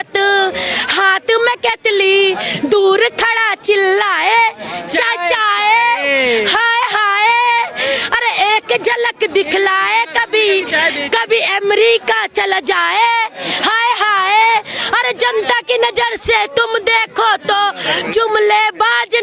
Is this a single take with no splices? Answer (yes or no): yes